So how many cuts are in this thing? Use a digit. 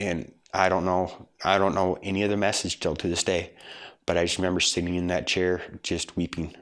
0